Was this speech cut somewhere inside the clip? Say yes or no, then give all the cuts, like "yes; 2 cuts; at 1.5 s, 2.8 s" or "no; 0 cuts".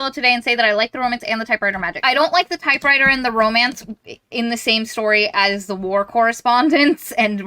yes; 1 cut; at 2.0 s